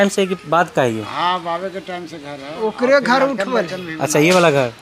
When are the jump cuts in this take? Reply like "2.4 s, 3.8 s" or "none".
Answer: none